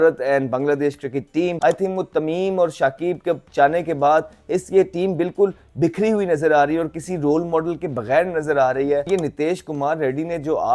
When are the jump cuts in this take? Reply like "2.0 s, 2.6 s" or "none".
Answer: 1.6 s, 9.1 s